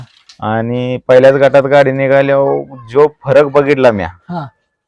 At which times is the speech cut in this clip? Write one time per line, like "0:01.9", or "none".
none

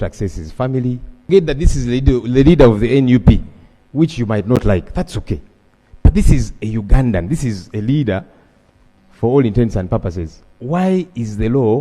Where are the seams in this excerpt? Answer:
0:01.3

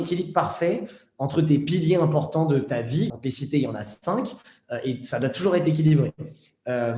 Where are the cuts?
0:03.1

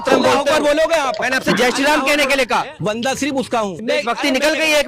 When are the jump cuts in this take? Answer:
0:01.3
0:02.7
0:03.8

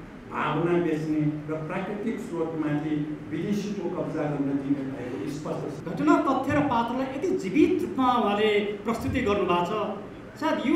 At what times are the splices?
0:05.8

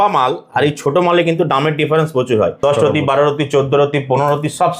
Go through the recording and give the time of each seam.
0:02.6

